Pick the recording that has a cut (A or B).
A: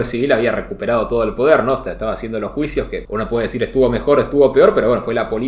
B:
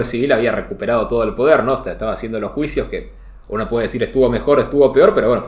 A